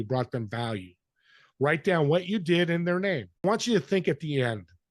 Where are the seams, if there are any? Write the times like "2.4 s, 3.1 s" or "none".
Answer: 3.4 s